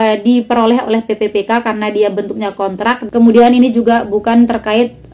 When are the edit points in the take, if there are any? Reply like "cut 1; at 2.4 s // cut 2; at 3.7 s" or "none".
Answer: cut 1; at 3.0 s